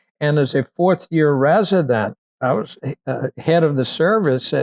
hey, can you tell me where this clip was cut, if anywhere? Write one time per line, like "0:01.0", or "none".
0:02.4